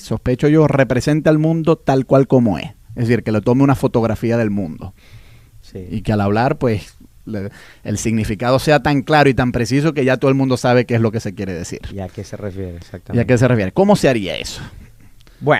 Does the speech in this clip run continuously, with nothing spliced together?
yes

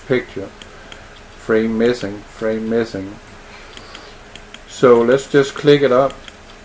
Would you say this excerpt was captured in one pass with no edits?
no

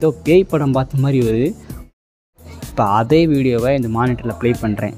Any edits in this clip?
yes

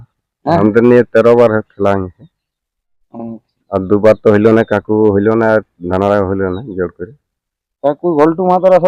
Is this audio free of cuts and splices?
yes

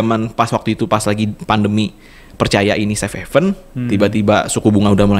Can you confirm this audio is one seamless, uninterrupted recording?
yes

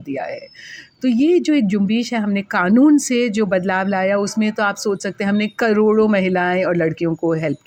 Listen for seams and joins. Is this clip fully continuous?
yes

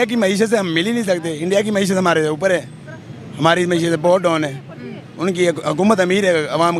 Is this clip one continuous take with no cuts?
yes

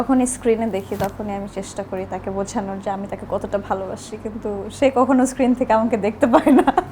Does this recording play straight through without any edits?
yes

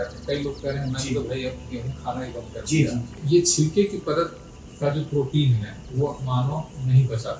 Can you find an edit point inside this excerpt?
yes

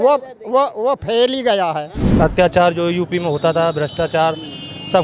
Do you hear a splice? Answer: yes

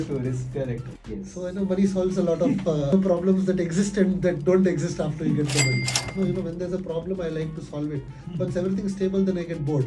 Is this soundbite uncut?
no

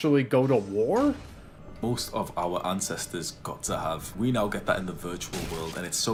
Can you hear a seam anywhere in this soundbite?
no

